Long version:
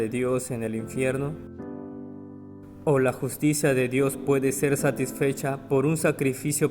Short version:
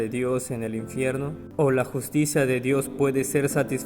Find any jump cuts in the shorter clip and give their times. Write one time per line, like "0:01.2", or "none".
0:01.4